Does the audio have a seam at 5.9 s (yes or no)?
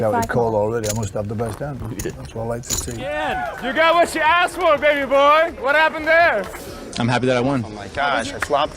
no